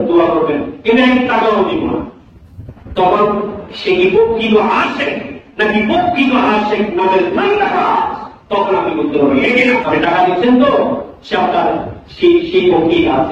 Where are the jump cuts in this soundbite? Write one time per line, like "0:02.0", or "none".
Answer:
0:09.8